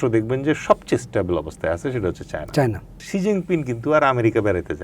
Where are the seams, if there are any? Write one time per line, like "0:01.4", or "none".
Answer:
0:03.1